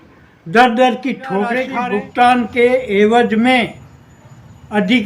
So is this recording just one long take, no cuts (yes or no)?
no